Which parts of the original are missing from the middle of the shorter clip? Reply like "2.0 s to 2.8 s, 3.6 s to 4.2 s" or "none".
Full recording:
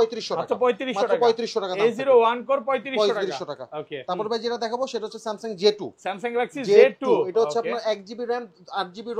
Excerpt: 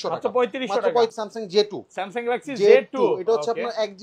1.4 s to 5.2 s